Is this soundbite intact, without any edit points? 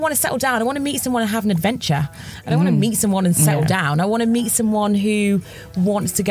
yes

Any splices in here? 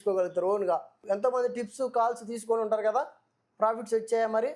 yes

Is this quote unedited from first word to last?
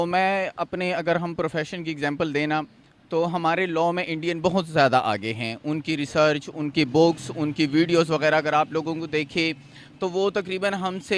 yes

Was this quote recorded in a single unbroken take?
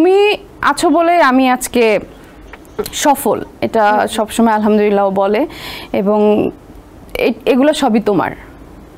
yes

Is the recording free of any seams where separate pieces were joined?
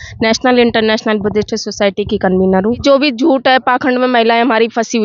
no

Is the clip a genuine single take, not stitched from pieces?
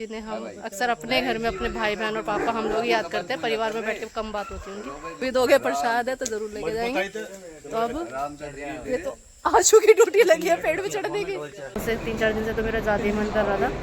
no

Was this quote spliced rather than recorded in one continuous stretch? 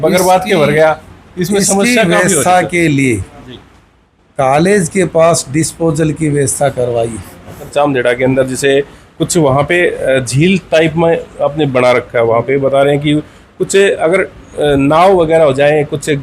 yes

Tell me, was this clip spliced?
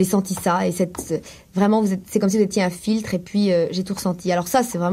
no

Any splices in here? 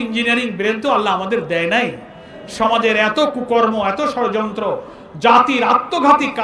no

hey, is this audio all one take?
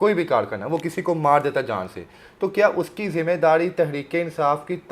yes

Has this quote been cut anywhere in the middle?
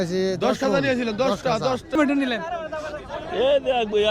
yes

